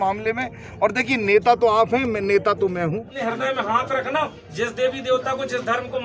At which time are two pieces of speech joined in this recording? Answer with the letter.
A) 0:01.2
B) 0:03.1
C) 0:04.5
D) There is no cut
B